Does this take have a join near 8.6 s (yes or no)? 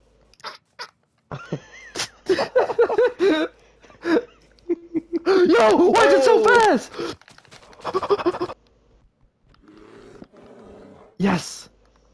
yes